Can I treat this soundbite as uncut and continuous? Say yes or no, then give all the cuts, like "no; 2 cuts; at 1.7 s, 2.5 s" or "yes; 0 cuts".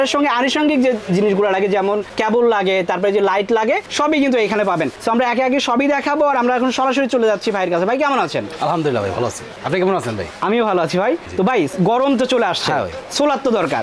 yes; 0 cuts